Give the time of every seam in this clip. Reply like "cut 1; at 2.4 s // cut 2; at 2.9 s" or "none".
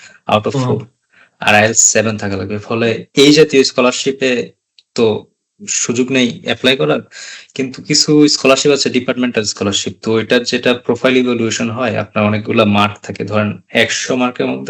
none